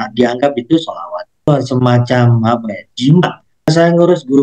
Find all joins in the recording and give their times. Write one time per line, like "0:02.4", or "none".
0:01.5
0:03.7